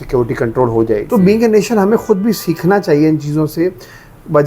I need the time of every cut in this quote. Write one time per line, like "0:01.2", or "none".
0:01.1